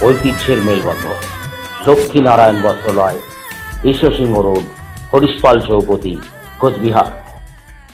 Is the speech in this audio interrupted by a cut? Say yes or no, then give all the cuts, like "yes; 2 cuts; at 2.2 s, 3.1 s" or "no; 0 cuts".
no; 0 cuts